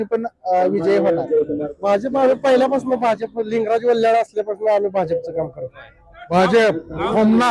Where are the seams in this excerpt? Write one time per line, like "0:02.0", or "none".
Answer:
0:01.7
0:06.3

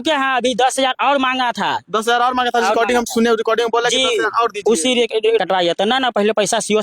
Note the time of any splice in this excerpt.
0:05.4

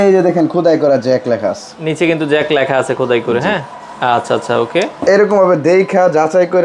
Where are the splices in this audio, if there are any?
none

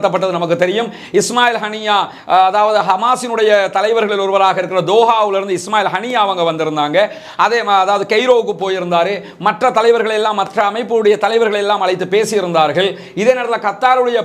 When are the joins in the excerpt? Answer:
none

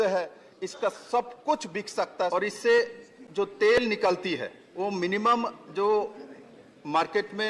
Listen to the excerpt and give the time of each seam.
0:02.3
0:04.6

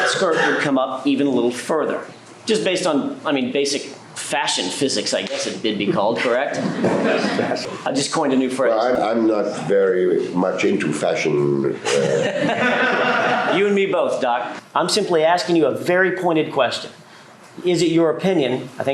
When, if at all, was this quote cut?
0:07.6
0:08.9
0:14.5

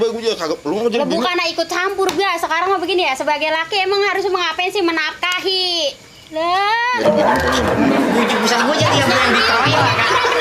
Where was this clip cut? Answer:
none

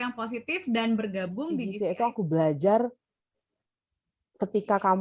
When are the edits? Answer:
0:01.7

